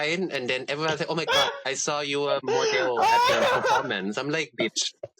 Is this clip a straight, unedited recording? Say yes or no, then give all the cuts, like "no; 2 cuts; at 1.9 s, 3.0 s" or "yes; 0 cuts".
yes; 0 cuts